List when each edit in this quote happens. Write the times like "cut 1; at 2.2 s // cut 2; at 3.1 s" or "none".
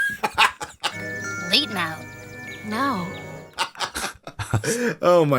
none